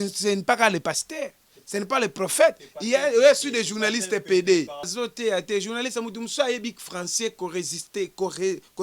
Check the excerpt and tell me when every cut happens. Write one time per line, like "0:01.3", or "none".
0:04.9